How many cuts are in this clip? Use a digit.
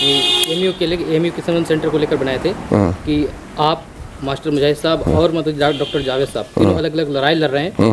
0